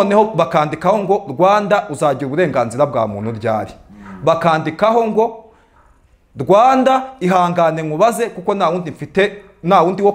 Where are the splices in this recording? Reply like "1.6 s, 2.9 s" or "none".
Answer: none